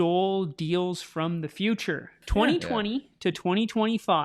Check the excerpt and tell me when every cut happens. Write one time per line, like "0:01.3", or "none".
0:02.2

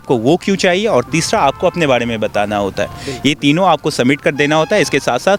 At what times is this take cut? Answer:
none

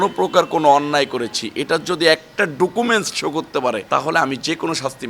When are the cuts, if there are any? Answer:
0:03.8

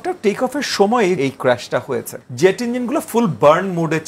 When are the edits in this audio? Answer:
0:01.2
0:02.2

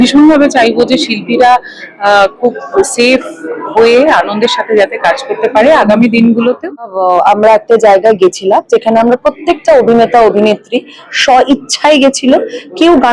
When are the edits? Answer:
0:06.8

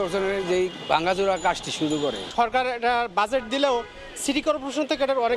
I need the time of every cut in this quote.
0:02.2

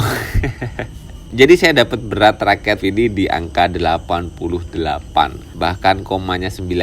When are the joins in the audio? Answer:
0:02.8
0:05.4

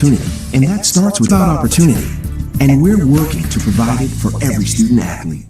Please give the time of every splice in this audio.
0:01.3

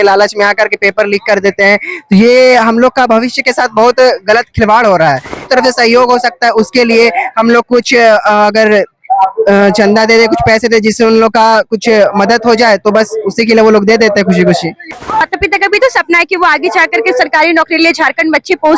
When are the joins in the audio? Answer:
0:05.5
0:15.3

